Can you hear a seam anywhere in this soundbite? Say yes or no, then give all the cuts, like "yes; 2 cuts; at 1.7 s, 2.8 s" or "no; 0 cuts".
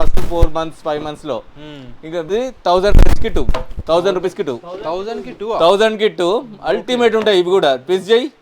yes; 1 cut; at 2.3 s